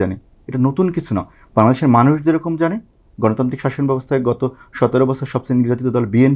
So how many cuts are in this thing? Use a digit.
0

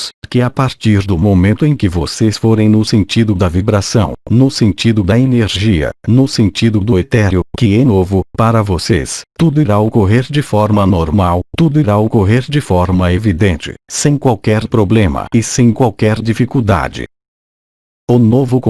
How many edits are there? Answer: 1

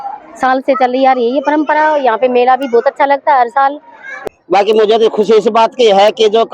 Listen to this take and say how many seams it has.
1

